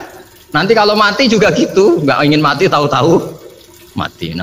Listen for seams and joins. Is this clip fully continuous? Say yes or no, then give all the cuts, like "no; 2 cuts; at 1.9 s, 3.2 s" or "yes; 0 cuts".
yes; 0 cuts